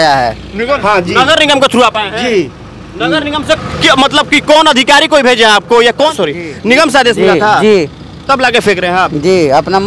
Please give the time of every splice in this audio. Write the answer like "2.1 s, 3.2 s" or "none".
0.8 s, 6.1 s